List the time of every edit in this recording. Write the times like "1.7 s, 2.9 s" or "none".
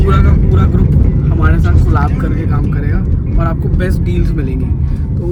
none